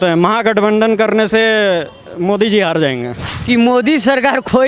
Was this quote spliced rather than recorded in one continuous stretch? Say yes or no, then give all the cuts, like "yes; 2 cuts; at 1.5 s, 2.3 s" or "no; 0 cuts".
yes; 1 cut; at 3.3 s